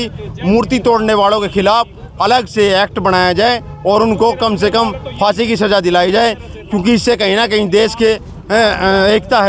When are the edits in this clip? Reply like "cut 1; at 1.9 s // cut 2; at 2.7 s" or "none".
none

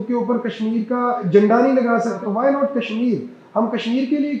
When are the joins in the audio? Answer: cut 1; at 1.2 s // cut 2; at 2.2 s

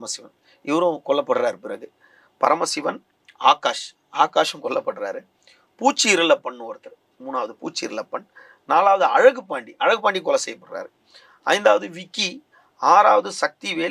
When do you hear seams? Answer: none

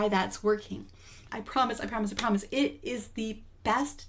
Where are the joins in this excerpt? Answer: cut 1; at 1.3 s

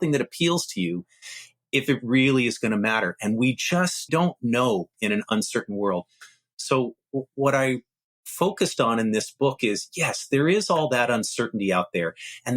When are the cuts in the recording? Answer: cut 1; at 4.1 s // cut 2; at 4.9 s

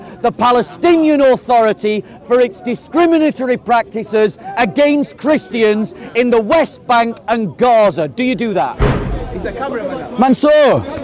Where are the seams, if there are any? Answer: cut 1; at 8.9 s

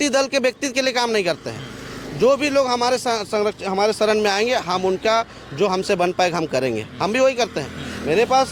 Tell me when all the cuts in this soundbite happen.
none

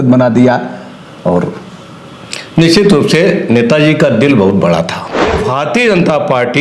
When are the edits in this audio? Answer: cut 1; at 5.4 s

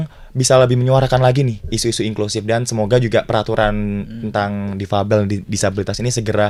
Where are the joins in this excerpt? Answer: none

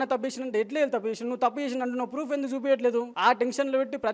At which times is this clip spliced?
cut 1; at 3.1 s

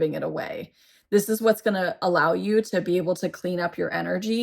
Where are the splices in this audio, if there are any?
cut 1; at 2.0 s

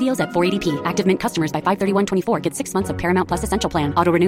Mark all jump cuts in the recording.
none

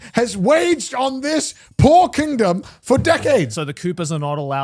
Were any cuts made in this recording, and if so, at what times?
cut 1; at 3.5 s

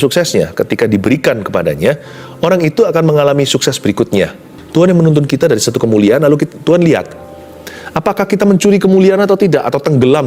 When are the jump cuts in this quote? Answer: cut 1; at 4.5 s

